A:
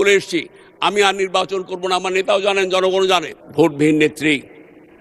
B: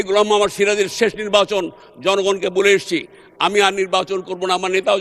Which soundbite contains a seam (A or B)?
A